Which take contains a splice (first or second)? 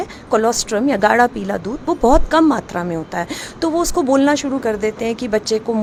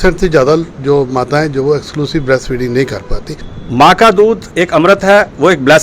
second